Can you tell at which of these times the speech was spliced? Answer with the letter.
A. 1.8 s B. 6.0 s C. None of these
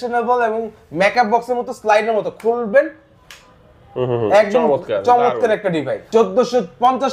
B